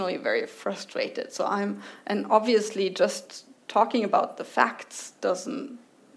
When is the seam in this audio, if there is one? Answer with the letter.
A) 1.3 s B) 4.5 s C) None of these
C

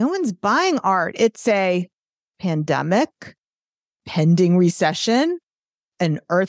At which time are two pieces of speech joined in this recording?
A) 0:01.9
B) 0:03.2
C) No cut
C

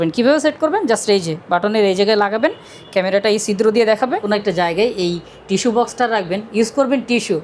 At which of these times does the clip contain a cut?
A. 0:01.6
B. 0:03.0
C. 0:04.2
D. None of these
C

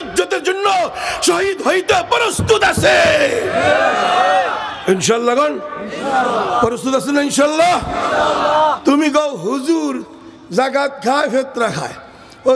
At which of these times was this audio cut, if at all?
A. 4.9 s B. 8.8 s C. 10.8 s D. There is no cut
B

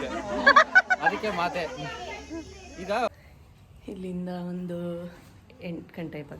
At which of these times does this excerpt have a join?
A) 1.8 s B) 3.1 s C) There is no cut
B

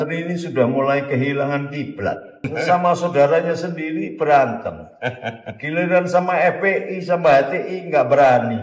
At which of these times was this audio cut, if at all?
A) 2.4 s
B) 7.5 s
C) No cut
A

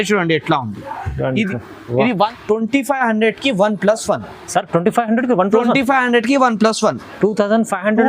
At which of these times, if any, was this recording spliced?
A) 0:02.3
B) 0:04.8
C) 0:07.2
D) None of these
A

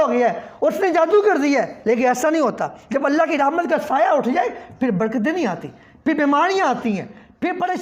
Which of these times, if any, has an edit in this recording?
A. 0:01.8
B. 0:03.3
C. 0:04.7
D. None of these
D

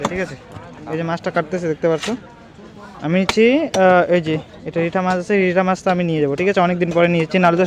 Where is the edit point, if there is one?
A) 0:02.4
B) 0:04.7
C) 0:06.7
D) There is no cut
D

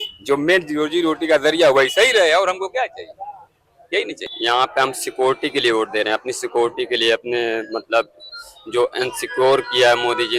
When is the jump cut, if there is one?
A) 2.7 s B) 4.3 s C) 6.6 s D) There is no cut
B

